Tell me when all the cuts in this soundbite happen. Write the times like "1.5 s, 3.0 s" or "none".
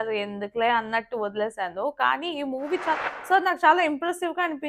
3.0 s